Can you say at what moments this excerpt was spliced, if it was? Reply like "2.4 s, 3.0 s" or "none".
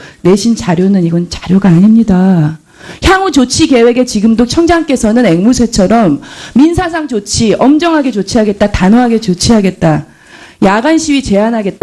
3.5 s